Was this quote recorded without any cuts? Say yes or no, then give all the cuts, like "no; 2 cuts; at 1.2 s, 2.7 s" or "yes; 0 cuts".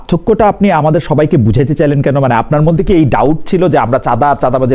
yes; 0 cuts